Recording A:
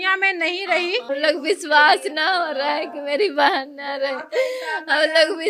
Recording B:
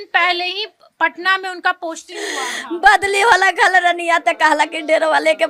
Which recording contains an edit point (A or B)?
A